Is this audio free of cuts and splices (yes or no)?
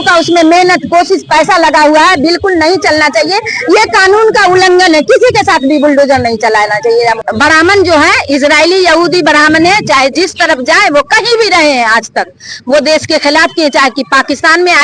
no